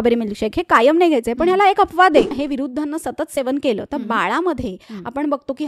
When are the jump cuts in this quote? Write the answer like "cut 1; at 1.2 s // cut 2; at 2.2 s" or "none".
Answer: cut 1; at 2.3 s